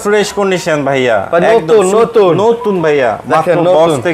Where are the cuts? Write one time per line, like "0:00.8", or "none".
none